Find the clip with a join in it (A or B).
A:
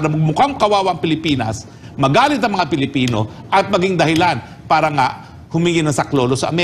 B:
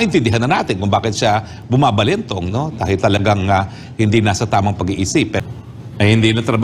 B